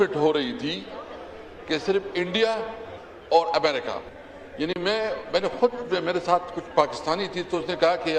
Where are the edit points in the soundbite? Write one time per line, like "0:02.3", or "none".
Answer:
none